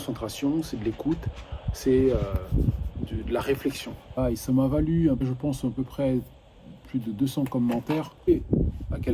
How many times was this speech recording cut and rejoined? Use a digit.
2